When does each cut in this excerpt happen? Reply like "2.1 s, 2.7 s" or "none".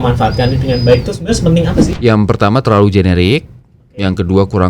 1.9 s

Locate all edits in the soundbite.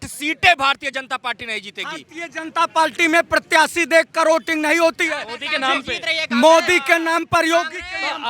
none

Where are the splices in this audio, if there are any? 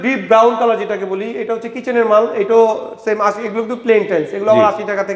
none

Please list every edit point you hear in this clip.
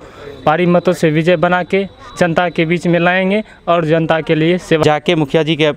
4.8 s

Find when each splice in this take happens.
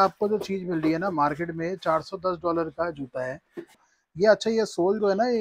3.9 s

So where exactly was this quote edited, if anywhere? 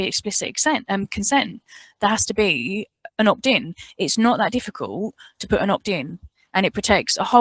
none

